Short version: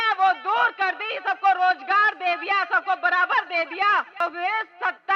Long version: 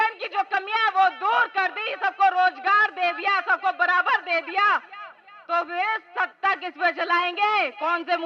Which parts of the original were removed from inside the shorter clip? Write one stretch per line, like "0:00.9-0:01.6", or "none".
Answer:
0:05.0-0:05.5

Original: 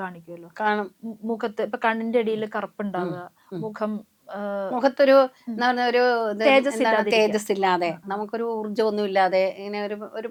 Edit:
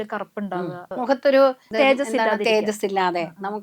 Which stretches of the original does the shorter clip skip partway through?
0:03.3-0:04.7
0:05.4-0:06.3

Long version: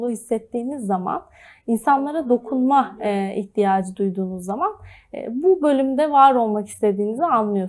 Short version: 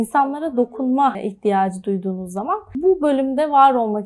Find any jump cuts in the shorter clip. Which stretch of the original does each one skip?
0:02.9-0:03.3
0:04.8-0:05.3

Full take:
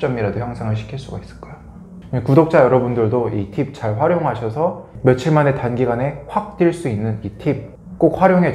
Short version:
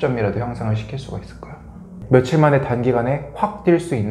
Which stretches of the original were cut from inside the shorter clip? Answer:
0:01.9-0:04.9

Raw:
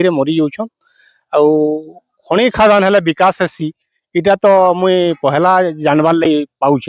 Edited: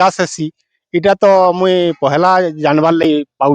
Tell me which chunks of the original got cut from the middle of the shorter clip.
none

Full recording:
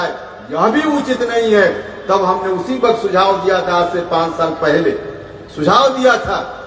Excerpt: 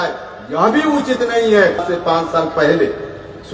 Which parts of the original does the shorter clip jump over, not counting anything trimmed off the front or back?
0:01.8-0:03.9

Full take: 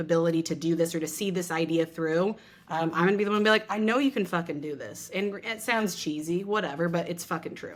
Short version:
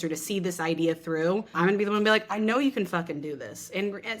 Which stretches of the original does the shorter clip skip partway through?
0:02.4-0:02.9

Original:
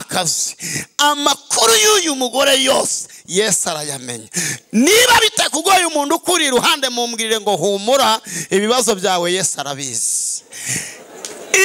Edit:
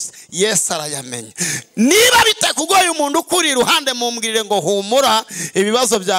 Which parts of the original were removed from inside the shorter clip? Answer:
none

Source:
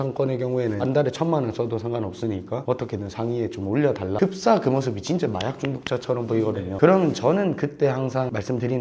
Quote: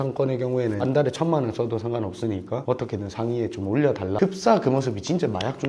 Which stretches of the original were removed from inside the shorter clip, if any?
none

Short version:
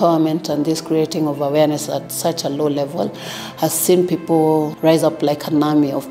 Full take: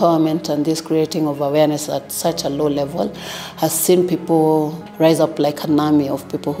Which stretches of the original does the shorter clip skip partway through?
0:04.7-0:04.9

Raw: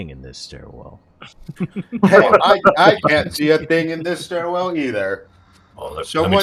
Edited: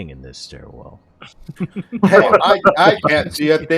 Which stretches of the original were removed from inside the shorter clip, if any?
none

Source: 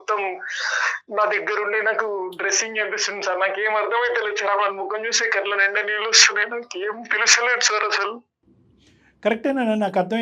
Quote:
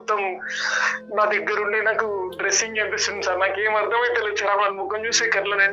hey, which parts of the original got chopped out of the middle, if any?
none

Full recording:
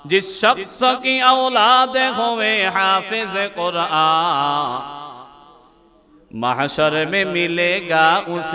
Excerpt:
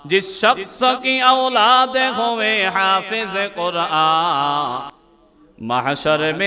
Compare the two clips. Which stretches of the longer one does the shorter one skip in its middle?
0:05.0-0:05.7

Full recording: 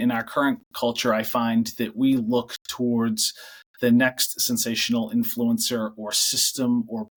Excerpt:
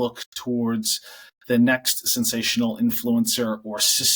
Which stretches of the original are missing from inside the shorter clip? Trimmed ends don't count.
none

